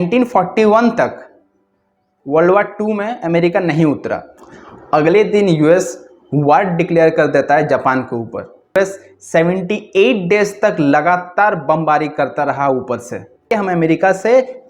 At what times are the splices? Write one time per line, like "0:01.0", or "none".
0:04.3
0:08.8
0:13.5